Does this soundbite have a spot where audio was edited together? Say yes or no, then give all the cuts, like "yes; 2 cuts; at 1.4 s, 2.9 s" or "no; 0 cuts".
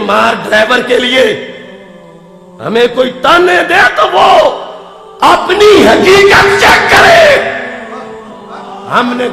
no; 0 cuts